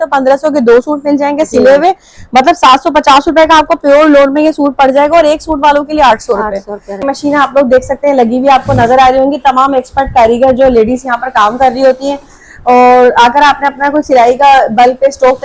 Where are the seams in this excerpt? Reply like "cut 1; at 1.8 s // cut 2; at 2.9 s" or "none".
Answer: cut 1; at 7.0 s